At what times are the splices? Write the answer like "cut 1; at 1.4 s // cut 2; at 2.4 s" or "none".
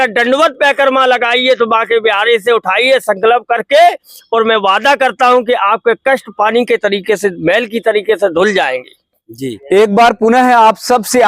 cut 1; at 9.5 s